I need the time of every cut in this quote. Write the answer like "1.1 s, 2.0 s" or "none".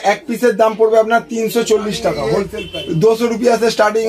2.6 s